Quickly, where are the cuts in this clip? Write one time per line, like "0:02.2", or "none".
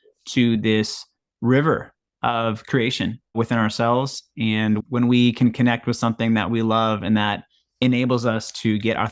0:04.8